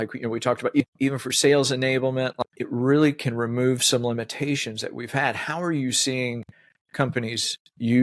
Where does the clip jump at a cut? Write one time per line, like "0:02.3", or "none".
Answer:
0:00.8
0:02.4